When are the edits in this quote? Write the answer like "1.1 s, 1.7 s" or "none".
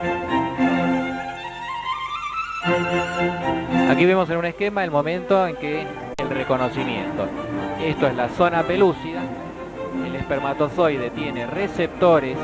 none